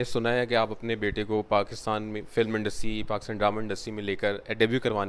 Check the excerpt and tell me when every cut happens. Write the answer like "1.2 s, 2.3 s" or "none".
none